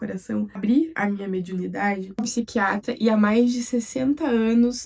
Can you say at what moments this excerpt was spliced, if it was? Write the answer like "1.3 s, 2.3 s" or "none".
0.9 s, 2.3 s